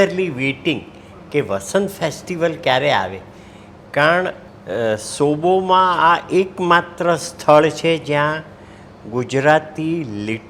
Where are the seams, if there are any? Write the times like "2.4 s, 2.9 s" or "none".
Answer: none